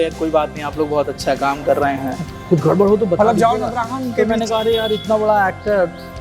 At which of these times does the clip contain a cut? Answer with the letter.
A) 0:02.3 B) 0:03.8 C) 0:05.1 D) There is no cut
A